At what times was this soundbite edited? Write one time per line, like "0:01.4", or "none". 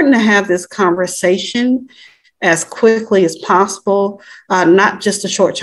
none